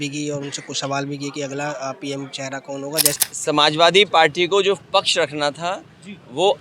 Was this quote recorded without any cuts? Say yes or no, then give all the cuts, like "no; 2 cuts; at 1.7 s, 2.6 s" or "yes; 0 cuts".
no; 1 cut; at 3.2 s